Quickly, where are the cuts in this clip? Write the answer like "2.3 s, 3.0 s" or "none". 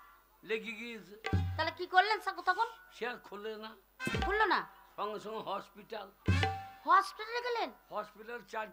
none